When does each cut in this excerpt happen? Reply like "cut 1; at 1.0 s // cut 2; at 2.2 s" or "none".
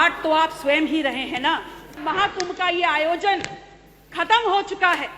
cut 1; at 2.0 s